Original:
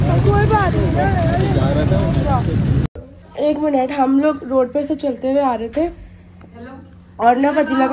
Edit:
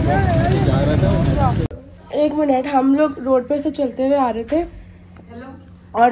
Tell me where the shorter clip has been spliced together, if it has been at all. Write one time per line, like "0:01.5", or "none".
0:01.7